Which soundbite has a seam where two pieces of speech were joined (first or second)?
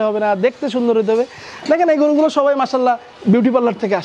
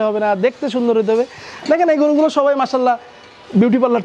first